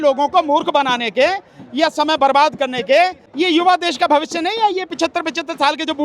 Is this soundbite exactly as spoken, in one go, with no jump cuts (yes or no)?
no